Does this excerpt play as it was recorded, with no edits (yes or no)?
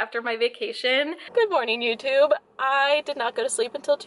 no